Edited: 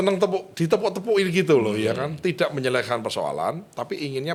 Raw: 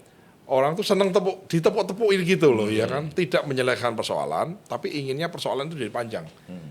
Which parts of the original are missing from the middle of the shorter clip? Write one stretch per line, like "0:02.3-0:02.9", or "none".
none